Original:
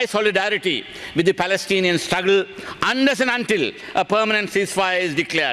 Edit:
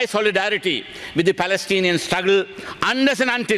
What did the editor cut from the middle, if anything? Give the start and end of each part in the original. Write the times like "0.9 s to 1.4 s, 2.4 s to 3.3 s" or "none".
none